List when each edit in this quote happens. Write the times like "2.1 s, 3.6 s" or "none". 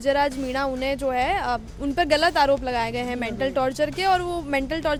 none